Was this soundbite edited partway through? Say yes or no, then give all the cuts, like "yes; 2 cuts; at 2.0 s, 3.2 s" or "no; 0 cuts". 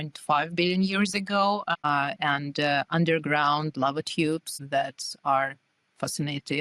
yes; 1 cut; at 1.7 s